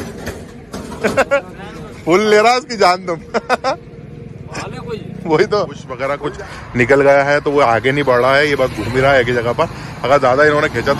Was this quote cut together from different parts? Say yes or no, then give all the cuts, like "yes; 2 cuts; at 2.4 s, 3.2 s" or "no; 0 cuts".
yes; 1 cut; at 6.1 s